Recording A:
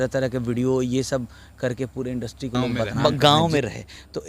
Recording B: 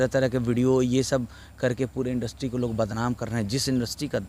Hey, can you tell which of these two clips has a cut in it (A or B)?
A